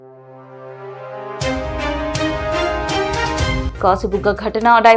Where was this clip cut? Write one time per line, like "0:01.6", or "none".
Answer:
none